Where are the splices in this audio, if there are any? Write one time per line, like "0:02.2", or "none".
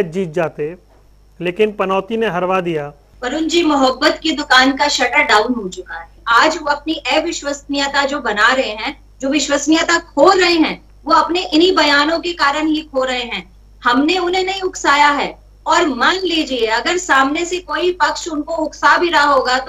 0:03.0
0:06.2